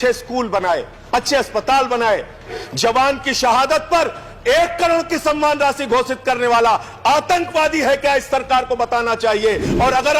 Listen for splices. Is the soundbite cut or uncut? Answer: cut